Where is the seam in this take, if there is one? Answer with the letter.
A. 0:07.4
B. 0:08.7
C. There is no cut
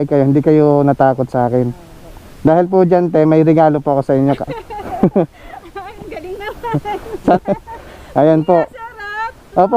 A